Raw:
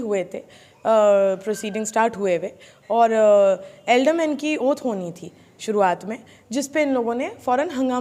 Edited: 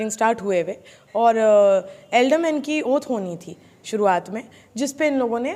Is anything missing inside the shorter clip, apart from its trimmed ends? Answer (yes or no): no